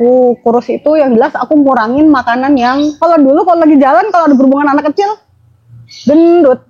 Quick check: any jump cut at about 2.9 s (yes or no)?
yes